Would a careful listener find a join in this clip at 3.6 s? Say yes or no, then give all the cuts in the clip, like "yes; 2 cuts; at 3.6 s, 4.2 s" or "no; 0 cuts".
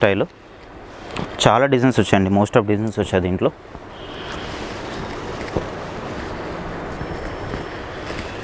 no; 0 cuts